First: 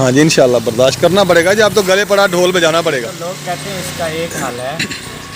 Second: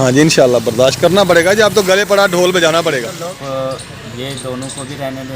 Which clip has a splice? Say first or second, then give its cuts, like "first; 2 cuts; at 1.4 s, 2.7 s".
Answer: second; 1 cut; at 3.4 s